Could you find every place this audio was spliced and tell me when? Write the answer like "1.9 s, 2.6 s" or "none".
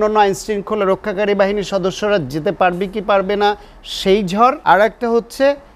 4.6 s